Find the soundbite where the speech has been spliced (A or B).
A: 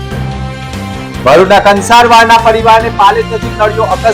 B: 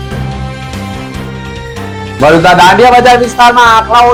A